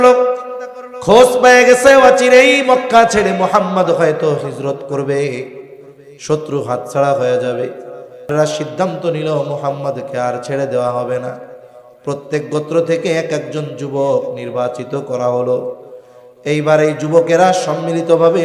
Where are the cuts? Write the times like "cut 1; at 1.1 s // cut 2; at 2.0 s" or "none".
cut 1; at 8.3 s